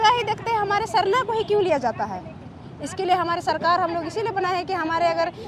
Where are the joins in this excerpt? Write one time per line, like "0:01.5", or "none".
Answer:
none

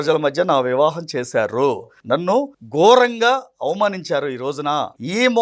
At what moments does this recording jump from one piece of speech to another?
none

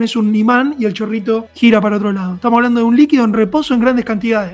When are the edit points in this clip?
0:01.5

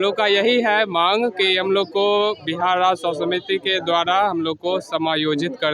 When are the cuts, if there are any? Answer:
none

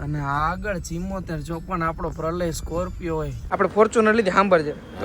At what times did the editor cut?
0:03.4

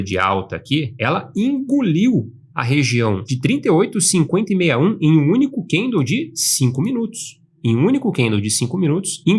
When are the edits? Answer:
0:00.9
0:03.3

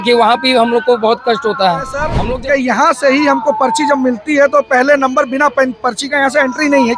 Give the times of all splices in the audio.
0:02.1

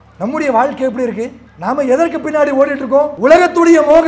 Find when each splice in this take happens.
0:01.4
0:03.1

